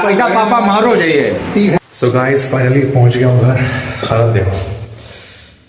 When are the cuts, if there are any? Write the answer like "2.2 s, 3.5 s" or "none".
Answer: 1.8 s